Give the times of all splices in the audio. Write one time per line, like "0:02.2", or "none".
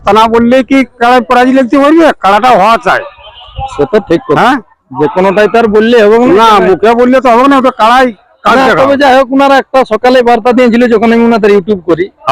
none